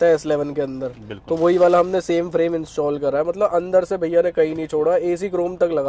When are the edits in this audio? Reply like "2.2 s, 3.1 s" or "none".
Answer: none